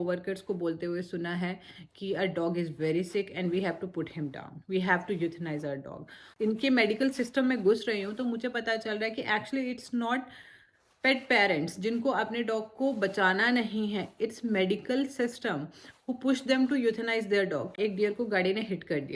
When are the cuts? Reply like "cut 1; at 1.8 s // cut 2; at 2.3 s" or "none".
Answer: cut 1; at 6.3 s // cut 2; at 17.7 s